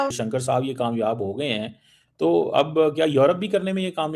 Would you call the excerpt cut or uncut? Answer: uncut